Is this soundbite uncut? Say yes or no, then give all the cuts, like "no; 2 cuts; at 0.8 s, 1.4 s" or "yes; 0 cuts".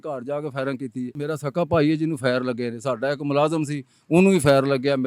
no; 1 cut; at 1.2 s